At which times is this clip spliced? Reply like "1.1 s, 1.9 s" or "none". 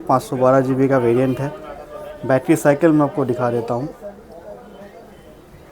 none